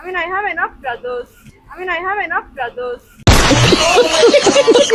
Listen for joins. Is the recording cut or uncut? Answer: uncut